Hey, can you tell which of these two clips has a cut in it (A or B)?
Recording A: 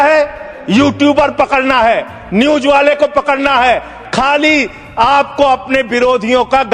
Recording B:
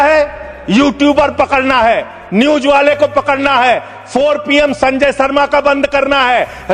A